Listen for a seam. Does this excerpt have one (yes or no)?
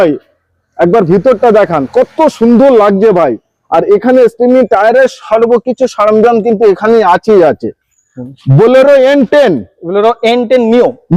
no